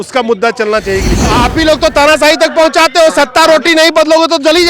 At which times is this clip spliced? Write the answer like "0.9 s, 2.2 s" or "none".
1.3 s